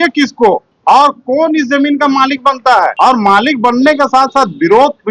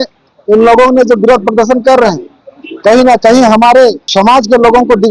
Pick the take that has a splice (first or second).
second